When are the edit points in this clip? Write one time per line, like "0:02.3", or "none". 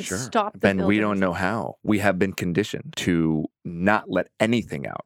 0:01.7
0:02.9
0:03.6

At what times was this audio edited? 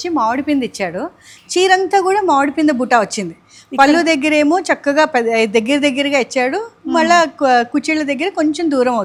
none

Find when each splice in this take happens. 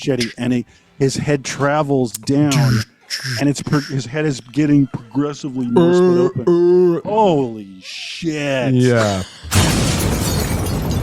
0:09.4

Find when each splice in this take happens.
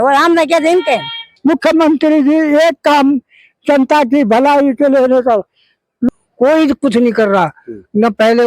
0:01.2
0:06.0

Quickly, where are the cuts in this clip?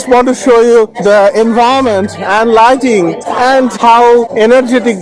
0:00.9
0:03.8

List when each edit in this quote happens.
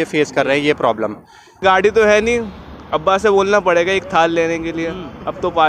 0:01.6

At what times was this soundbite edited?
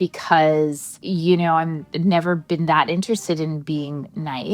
0:00.9

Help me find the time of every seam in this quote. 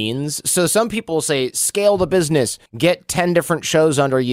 0:02.6

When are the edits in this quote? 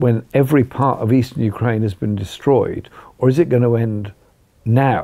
none

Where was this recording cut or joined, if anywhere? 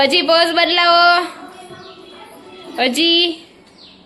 none

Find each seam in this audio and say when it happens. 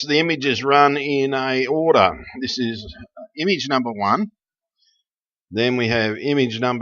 0:01.5

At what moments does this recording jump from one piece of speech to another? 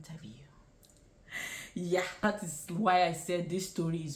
0:02.2

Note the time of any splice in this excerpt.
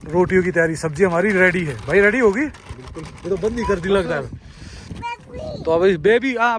none

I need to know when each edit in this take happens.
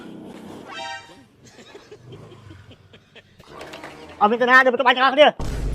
0:03.5

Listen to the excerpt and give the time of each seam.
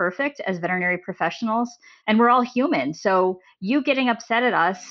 0:01.9

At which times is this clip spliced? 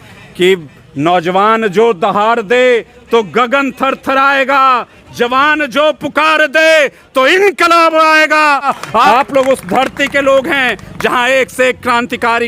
0:08.7

